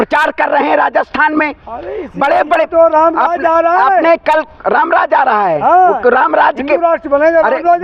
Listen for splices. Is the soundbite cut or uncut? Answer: uncut